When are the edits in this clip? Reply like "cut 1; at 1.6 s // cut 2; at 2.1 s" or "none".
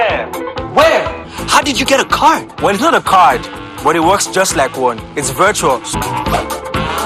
cut 1; at 1.3 s // cut 2; at 5.9 s